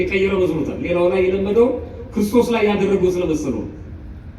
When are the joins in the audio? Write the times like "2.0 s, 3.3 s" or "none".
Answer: none